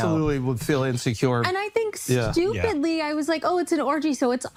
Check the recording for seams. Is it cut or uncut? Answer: uncut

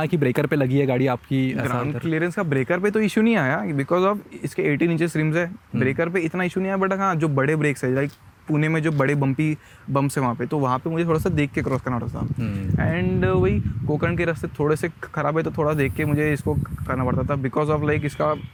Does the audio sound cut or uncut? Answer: uncut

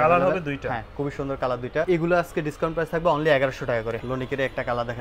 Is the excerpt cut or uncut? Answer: cut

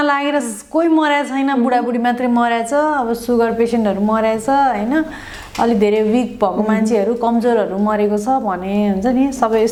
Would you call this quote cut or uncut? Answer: uncut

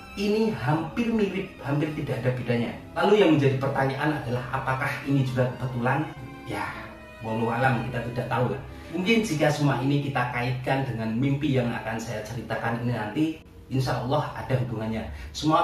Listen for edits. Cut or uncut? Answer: uncut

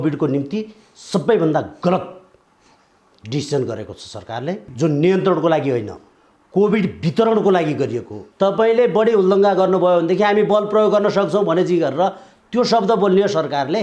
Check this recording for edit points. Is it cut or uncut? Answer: cut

